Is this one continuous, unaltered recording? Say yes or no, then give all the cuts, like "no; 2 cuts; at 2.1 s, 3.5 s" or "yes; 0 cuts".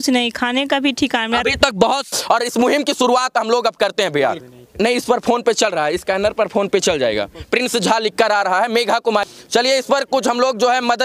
no; 3 cuts; at 2.1 s, 4.5 s, 9.2 s